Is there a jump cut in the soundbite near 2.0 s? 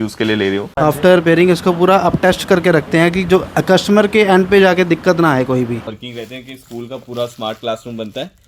no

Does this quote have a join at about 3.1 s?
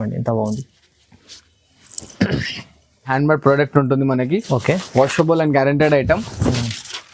yes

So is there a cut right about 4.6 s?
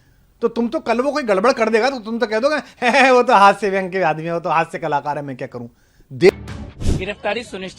no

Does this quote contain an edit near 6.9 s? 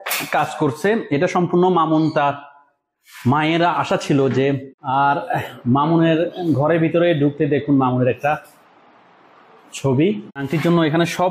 no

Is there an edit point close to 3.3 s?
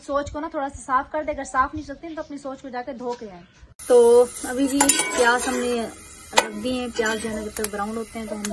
no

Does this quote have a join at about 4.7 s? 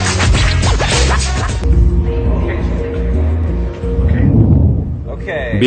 yes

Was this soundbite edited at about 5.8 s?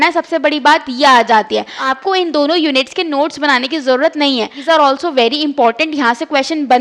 no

